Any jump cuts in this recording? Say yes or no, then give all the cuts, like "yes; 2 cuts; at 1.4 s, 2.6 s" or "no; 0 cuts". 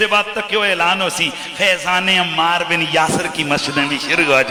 no; 0 cuts